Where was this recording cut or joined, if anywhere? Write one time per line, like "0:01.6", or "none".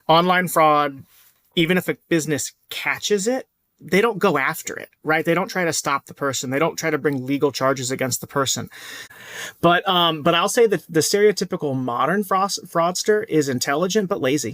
0:09.1